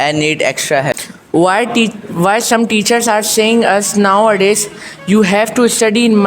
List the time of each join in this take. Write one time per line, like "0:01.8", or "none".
0:00.9